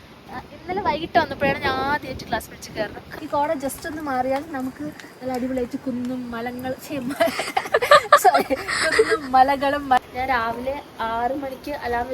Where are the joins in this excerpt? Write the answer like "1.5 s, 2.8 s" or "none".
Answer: 3.0 s, 10.0 s